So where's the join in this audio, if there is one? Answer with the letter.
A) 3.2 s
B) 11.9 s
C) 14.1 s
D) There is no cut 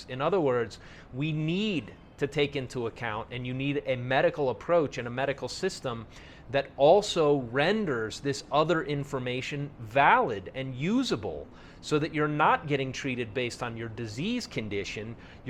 A